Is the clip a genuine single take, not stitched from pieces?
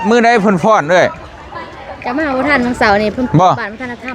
yes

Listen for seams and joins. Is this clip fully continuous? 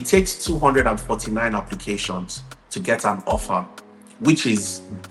yes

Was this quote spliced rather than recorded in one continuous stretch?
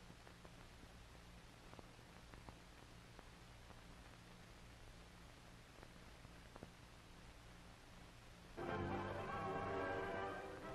no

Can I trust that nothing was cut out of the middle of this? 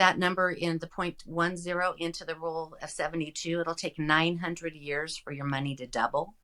yes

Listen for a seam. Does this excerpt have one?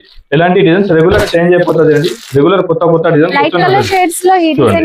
no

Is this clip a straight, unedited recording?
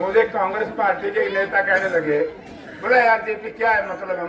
yes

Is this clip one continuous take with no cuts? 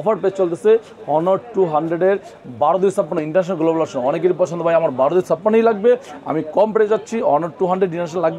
yes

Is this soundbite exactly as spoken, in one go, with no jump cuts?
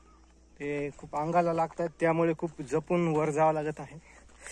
yes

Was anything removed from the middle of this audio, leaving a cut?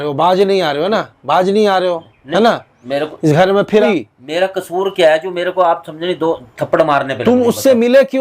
yes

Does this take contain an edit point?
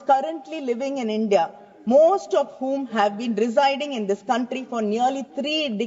no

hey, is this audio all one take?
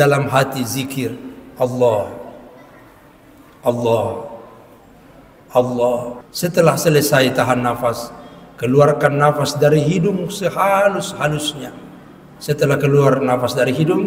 no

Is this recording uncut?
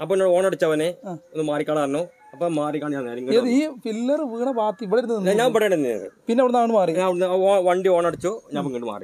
yes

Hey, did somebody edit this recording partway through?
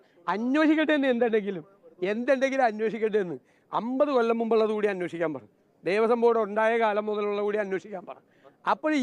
no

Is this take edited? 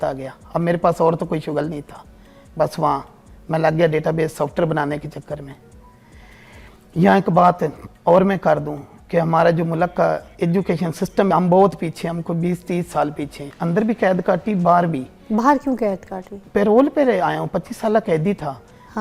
yes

